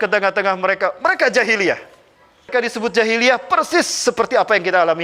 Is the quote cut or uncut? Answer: cut